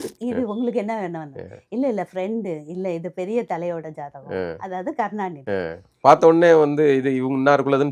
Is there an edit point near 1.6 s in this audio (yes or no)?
no